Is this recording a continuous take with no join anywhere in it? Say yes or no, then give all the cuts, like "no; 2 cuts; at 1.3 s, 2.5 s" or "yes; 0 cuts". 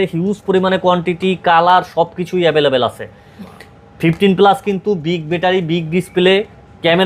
yes; 0 cuts